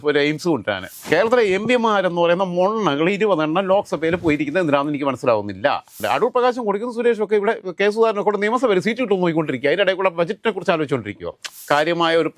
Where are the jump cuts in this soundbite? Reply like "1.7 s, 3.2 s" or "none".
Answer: 0.9 s, 6.0 s, 11.5 s